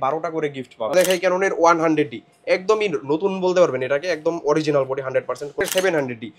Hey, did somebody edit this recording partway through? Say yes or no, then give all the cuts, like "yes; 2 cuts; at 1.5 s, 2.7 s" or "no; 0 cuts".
yes; 2 cuts; at 0.9 s, 5.6 s